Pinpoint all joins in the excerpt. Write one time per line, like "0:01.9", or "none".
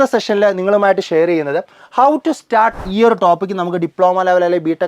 0:02.9